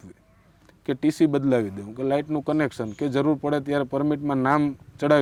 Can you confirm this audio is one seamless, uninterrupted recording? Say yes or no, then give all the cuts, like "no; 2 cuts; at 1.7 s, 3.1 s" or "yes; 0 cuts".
yes; 0 cuts